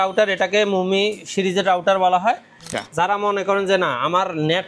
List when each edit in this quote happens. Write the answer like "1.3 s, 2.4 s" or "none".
2.6 s